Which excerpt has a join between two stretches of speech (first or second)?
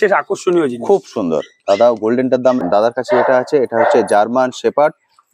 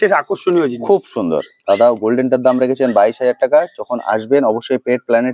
first